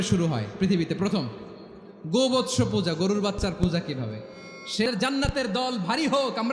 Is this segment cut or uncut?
cut